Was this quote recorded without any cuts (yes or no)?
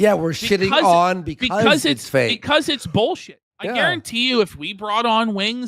no